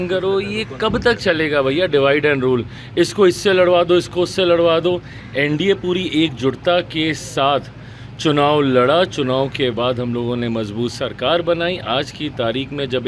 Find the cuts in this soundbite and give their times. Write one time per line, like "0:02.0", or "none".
none